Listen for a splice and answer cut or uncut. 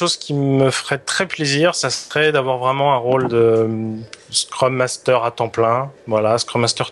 uncut